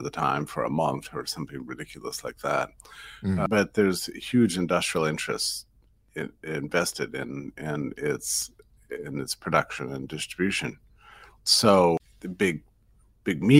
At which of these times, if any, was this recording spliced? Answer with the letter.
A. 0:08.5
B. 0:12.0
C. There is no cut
B